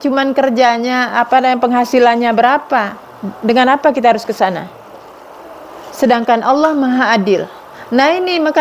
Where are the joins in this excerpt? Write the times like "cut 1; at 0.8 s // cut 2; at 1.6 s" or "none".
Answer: none